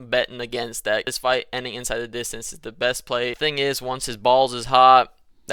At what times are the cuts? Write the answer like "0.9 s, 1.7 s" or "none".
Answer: 1.1 s, 3.4 s